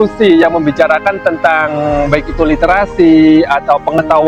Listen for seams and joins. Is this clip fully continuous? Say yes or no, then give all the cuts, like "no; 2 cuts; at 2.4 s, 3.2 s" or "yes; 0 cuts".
yes; 0 cuts